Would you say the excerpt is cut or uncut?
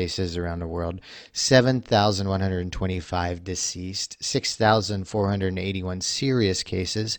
uncut